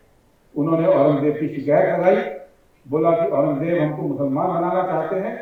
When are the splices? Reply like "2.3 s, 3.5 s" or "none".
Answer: none